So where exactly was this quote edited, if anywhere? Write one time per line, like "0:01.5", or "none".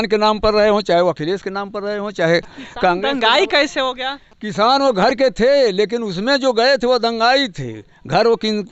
none